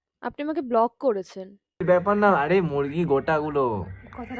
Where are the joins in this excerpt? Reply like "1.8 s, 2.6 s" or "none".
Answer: 1.8 s

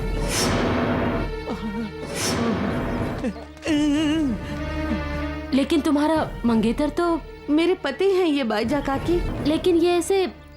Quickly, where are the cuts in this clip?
1.2 s, 3.2 s, 9.3 s

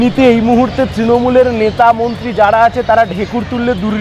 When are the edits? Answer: none

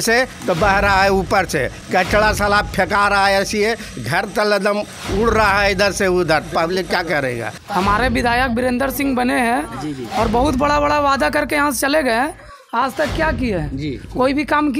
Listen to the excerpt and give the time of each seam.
7.5 s

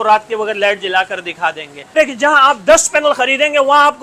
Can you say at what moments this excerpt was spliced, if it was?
2.0 s

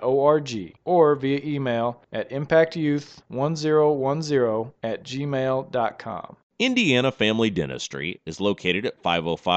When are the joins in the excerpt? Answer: none

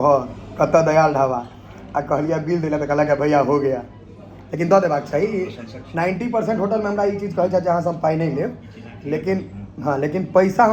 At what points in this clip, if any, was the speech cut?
none

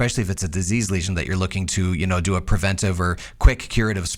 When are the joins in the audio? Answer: none

